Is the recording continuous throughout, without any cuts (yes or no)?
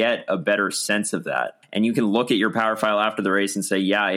no